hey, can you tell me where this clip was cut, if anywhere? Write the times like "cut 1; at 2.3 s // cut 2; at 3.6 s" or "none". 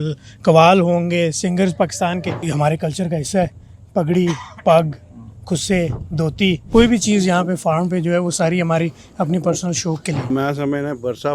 cut 1; at 2.4 s // cut 2; at 6.6 s // cut 3; at 10.2 s